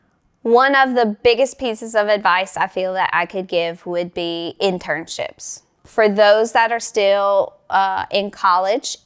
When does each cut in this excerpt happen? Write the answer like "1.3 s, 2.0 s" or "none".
5.7 s